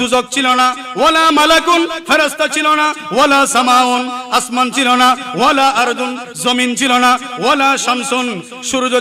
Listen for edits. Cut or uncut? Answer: uncut